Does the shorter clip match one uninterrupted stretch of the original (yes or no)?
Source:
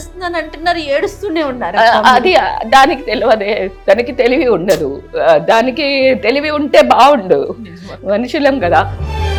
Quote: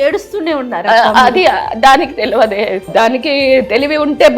no